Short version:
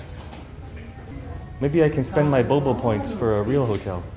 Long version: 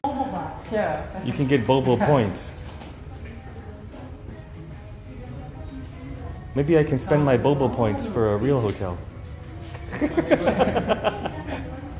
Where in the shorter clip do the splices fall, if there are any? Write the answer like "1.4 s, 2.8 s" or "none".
1.1 s

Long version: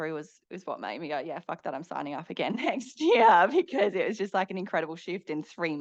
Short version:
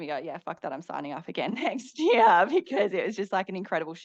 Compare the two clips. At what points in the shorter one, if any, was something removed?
none

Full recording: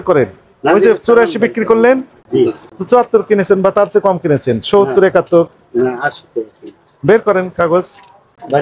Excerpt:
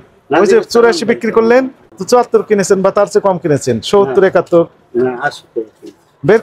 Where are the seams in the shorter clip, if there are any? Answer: 1.8 s

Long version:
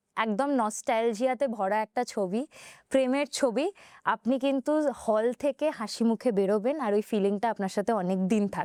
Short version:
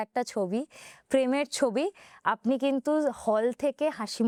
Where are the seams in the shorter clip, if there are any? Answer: none

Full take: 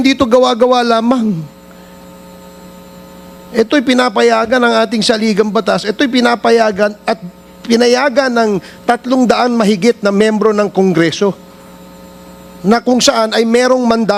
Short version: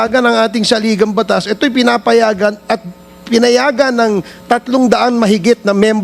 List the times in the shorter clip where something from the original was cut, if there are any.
none

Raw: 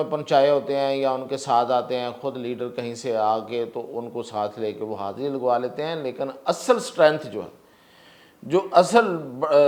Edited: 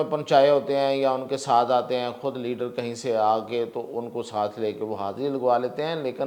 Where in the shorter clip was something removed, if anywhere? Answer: none

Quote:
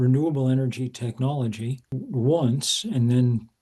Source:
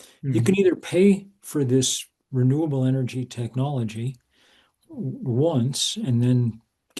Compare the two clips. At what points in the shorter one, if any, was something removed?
1.9 s

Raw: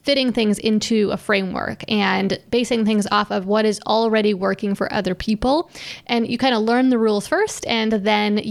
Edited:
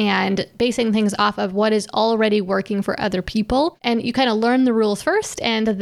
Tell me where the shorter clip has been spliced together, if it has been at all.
3.8 s

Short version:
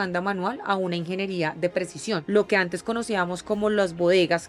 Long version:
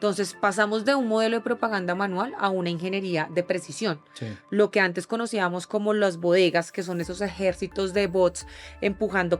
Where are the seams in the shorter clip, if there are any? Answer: 2.2 s

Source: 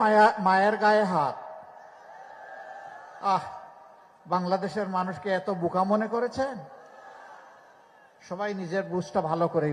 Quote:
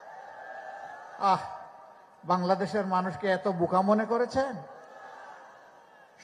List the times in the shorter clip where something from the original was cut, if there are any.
none

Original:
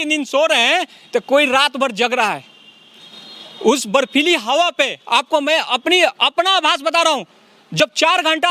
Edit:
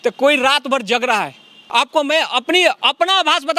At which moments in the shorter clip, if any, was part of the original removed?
1.6 s

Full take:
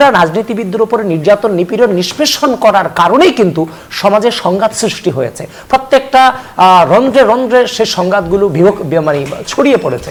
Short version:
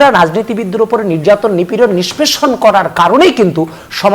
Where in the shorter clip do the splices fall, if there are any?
none

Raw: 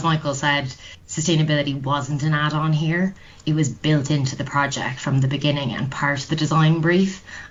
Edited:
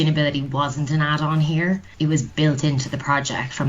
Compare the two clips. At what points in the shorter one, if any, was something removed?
1.9 s

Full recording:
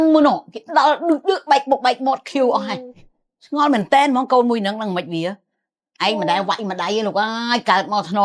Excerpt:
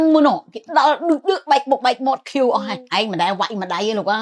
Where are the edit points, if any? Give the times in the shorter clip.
2.8 s

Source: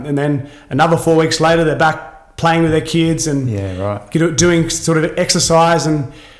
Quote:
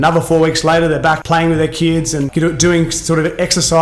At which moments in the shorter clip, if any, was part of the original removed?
1.2 s, 2.3 s

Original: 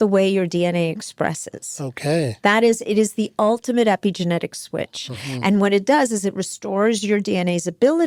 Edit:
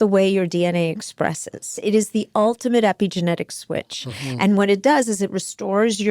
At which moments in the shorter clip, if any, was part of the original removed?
1.8 s

